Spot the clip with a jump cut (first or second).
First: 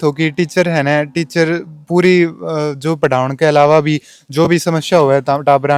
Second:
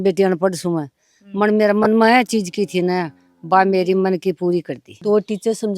second